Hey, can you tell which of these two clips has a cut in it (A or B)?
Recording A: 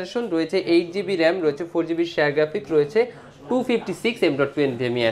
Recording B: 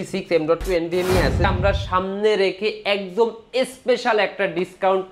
B